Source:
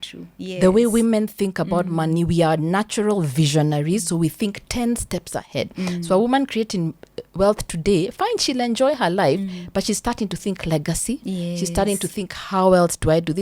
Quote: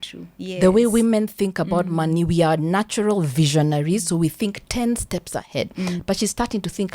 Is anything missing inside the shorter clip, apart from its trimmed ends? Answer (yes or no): yes